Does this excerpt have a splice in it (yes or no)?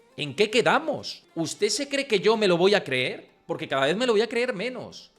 yes